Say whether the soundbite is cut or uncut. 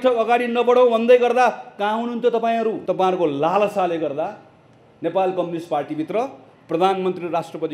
cut